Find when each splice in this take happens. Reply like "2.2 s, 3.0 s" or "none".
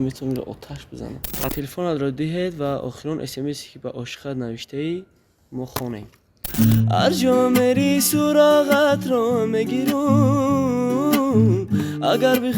1.5 s, 6.5 s